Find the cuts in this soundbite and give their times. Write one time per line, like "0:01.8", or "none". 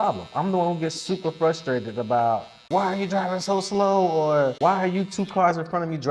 0:02.6
0:04.5